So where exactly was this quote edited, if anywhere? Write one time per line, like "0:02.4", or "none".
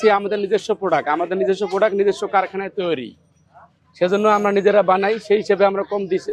none